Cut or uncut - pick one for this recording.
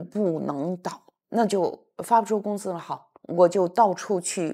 cut